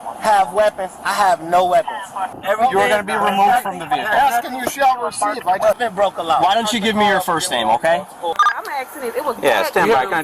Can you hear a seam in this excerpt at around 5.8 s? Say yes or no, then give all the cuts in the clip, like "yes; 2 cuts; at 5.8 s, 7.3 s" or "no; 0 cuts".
yes; 3 cuts; at 2.3 s, 5.8 s, 8.4 s